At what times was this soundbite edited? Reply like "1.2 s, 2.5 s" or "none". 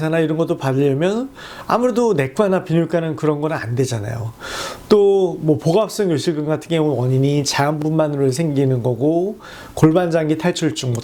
none